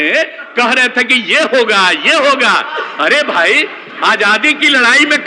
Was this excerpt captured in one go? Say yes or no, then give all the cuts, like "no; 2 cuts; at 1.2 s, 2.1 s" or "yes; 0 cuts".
yes; 0 cuts